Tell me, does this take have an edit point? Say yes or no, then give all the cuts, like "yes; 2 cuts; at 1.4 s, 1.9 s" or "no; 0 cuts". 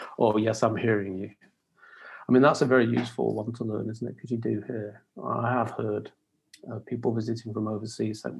no; 0 cuts